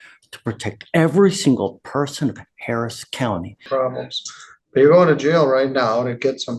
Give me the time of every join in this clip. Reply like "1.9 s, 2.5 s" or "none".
3.6 s